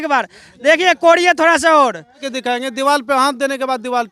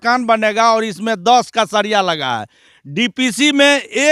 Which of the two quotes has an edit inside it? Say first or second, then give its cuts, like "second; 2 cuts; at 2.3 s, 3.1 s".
first; 1 cut; at 2.3 s